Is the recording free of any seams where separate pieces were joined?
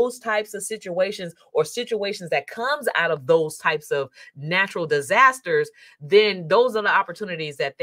yes; 0 cuts

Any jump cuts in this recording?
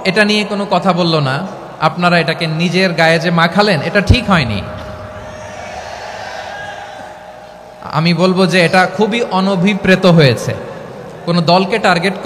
no; 0 cuts

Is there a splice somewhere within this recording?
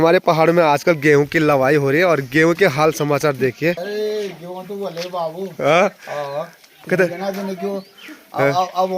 yes; 1 cut; at 3.9 s

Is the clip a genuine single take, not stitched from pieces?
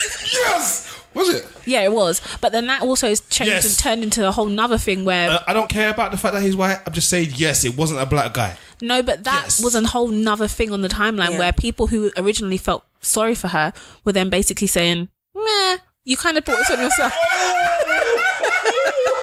yes; 0 cuts

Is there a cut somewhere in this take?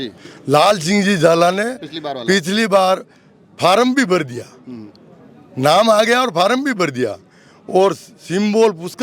no; 0 cuts

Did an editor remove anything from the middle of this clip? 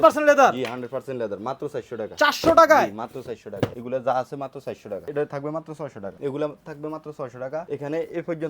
yes; 4 cuts; at 3.8 s, 4.9 s, 6.1 s, 7.7 s

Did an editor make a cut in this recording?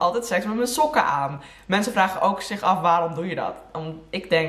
no; 0 cuts

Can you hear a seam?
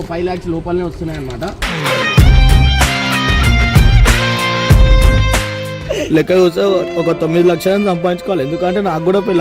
yes; 1 cut; at 5.9 s

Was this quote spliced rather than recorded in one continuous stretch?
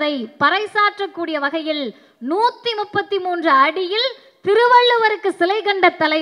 no; 0 cuts

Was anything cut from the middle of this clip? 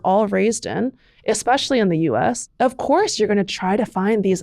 yes; 1 cut; at 2.5 s

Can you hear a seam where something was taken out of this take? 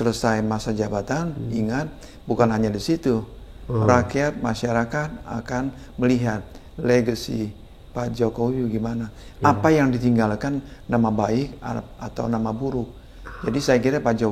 no; 0 cuts

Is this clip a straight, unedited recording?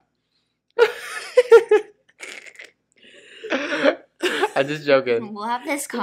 yes; 0 cuts

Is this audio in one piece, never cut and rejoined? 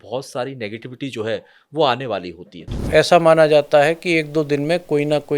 no; 1 cut; at 2.8 s

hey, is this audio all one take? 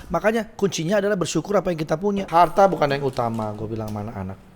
no; 1 cut; at 2.2 s

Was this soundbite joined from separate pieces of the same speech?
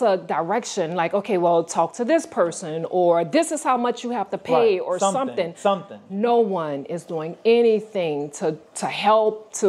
no; 0 cuts

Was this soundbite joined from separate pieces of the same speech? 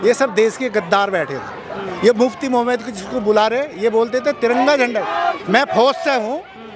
no; 0 cuts

